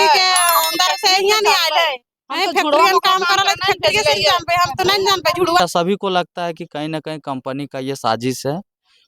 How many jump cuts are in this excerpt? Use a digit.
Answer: 1